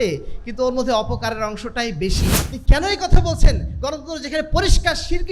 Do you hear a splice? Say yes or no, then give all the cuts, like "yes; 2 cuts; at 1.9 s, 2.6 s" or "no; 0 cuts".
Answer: yes; 1 cut; at 2.6 s